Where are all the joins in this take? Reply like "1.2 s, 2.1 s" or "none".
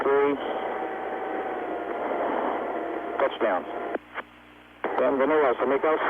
1.1 s